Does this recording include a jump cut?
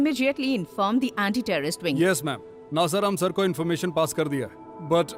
no; 0 cuts

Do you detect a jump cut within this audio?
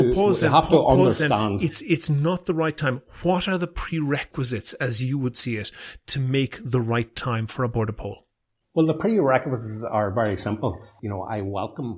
yes; 1 cut; at 10.9 s

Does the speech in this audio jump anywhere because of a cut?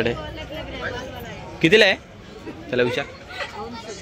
no; 0 cuts

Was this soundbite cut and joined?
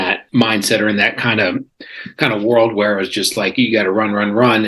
no; 0 cuts

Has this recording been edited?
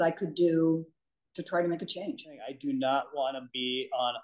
yes; 1 cut; at 2.5 s

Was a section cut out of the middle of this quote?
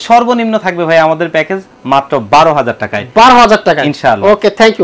no; 0 cuts

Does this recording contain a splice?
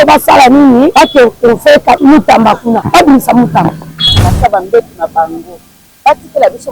yes; 4 cuts; at 0.9 s, 2.0 s, 2.8 s, 4.3 s

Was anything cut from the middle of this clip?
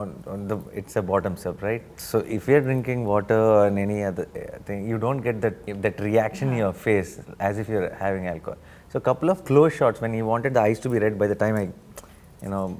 yes; 1 cut; at 5.7 s

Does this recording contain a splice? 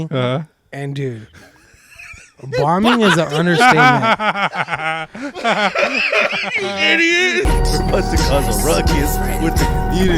yes; 1 cut; at 7.5 s

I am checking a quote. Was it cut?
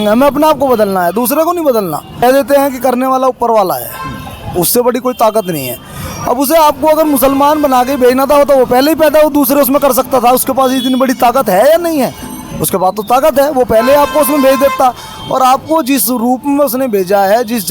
yes; 1 cut; at 2.2 s

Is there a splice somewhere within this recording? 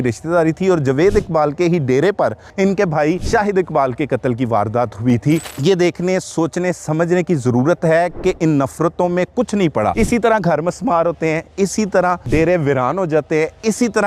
yes; 5 cuts; at 2.4 s, 3.2 s, 5.5 s, 9.9 s, 12.3 s

